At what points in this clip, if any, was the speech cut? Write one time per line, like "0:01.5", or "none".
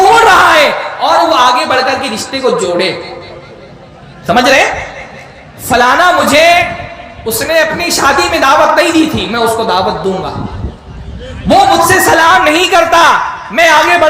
none